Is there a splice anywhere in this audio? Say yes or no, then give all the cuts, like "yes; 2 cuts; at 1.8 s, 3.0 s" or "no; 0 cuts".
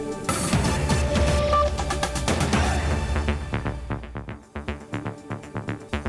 yes; 1 cut; at 4.5 s